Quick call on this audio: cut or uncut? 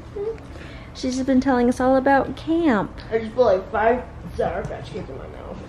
uncut